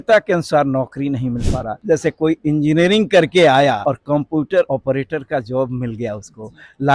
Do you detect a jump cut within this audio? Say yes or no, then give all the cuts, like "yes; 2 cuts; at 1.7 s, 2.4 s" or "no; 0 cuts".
yes; 3 cuts; at 1.7 s, 3.8 s, 4.7 s